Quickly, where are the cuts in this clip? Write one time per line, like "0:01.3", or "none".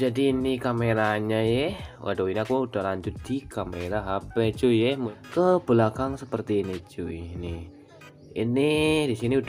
0:05.1